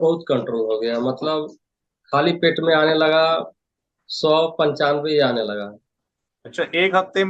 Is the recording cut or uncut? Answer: uncut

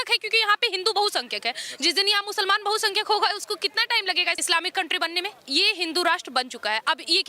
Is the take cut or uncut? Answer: cut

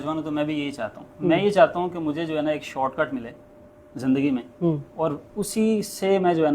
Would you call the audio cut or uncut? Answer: uncut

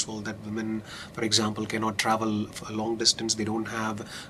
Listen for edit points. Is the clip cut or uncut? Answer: uncut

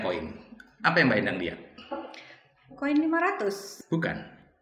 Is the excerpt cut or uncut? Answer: cut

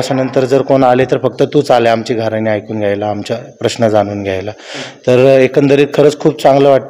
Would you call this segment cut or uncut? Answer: uncut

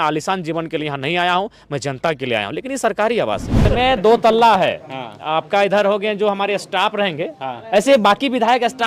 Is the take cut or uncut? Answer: cut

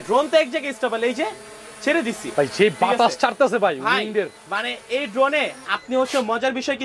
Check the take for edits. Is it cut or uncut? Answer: uncut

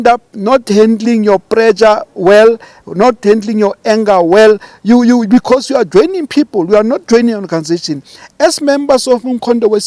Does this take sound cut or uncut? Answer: uncut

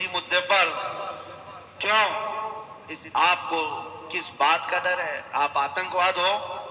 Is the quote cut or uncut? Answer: cut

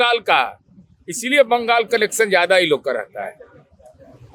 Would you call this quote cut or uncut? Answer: uncut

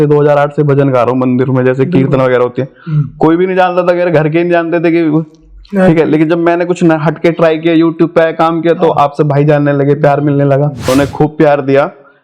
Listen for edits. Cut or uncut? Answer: cut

